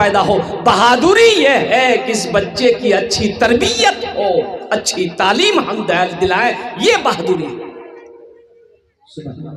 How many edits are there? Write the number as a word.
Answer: zero